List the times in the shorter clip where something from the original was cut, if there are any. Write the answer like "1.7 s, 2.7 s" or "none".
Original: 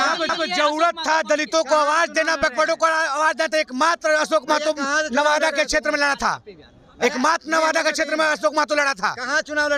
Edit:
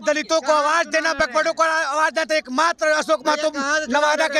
none